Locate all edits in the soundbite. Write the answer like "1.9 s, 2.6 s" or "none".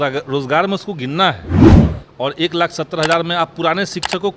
1.4 s, 1.9 s